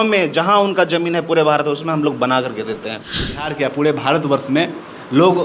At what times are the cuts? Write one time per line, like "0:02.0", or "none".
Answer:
0:03.5